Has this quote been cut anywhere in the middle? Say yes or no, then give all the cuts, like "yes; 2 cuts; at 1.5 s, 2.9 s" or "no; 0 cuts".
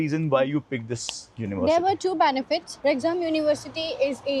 no; 0 cuts